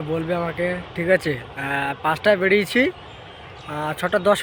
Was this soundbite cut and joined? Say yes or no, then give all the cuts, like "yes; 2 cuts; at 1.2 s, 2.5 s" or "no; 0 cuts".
no; 0 cuts